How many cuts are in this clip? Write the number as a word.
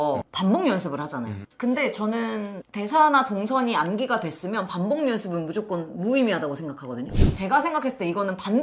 one